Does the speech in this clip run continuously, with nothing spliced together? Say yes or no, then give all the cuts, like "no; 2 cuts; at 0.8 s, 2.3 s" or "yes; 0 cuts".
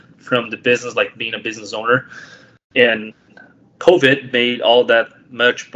yes; 0 cuts